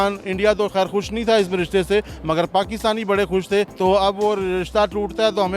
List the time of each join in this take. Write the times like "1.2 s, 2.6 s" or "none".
3.7 s